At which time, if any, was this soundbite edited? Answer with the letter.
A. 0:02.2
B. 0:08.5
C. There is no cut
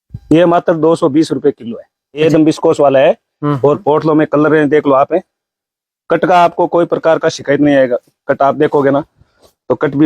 A